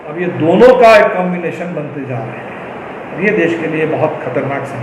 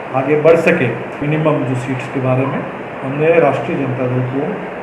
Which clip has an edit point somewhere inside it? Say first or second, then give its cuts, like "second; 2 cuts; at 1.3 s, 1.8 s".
second; 1 cut; at 1.2 s